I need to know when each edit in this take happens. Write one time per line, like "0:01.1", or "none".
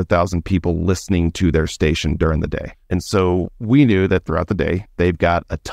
0:02.7
0:04.9